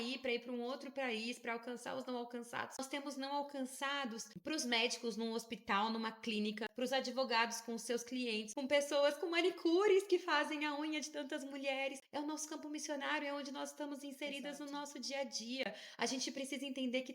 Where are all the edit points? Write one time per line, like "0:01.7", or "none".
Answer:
0:02.8
0:04.3
0:06.7
0:08.5
0:12.0